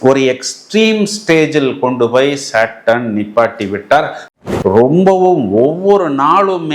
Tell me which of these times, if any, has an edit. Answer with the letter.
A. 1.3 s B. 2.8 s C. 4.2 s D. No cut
C